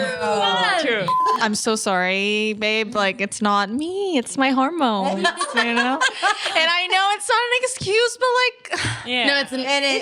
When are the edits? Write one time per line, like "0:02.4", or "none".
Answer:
0:01.2